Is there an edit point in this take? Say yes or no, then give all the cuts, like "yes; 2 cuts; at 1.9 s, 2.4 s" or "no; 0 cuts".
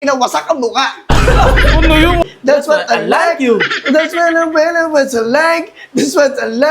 yes; 1 cut; at 2.2 s